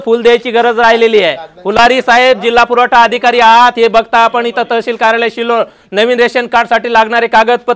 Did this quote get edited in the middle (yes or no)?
no